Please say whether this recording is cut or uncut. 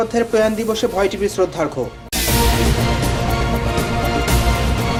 uncut